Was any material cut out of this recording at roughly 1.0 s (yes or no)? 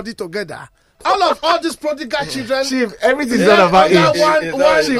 yes